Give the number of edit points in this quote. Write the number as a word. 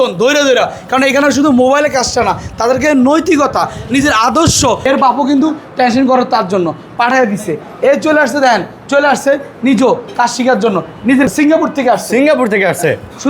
two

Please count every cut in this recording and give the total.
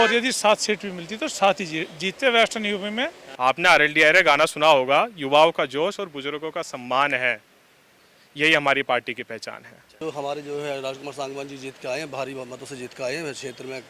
two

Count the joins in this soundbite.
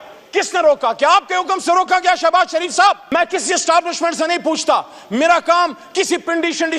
one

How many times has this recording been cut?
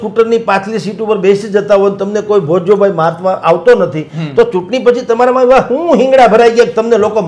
zero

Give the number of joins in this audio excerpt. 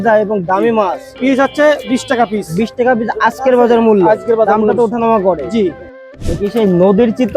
two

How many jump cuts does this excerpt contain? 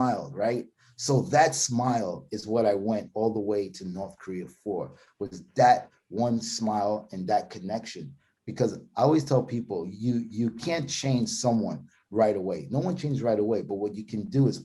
zero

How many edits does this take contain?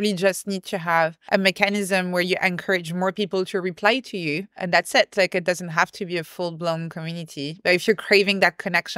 two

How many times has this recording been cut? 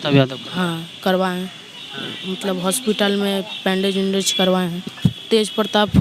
zero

